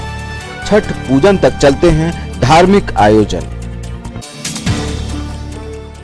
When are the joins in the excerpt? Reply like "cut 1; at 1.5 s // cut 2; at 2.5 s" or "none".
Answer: none